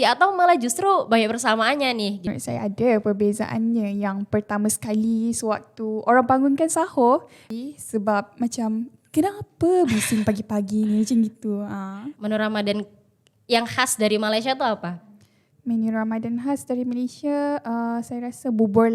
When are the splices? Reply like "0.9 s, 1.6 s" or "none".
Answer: 2.2 s, 7.4 s, 12.0 s

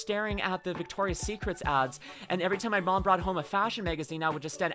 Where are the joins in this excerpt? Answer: none

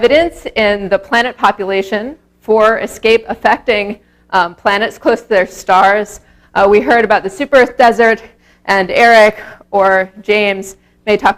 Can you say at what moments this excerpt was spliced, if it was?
2.0 s

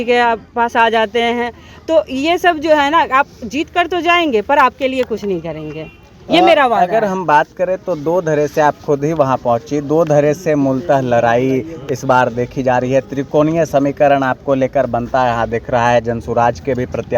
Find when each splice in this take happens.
none

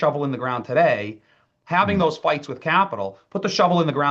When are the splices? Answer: none

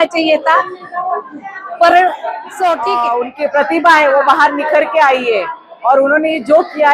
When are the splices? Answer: 3.0 s

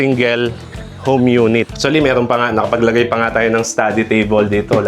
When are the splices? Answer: 1.7 s

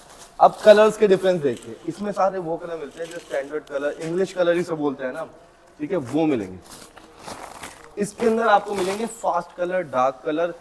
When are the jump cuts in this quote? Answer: none

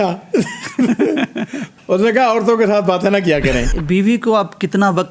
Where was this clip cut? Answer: 1.6 s, 3.7 s

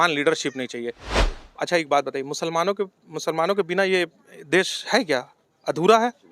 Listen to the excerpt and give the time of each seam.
1.3 s

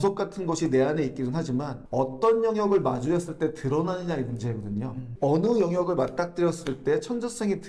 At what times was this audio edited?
5.0 s

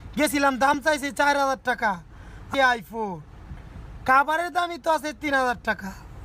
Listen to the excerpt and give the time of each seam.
none

